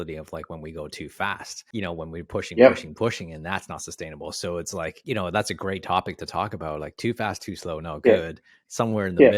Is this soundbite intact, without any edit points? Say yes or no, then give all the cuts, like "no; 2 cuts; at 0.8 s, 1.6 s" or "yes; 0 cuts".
no; 2 cuts; at 1.5 s, 5.0 s